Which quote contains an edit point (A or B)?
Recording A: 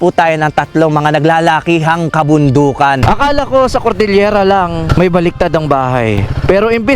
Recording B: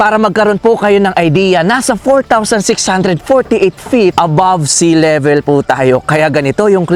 A